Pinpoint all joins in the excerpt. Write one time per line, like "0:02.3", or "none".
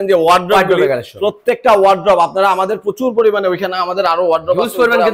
none